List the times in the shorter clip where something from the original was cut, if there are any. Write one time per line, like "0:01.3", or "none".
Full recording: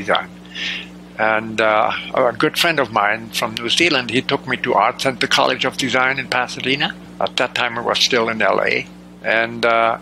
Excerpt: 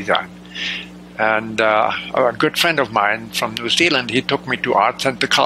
none